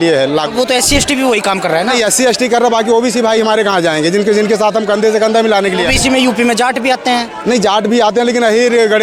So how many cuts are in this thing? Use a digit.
0